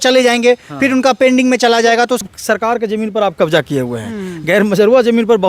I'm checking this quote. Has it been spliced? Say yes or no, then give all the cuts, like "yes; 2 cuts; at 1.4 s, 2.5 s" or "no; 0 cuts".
yes; 1 cut; at 2.2 s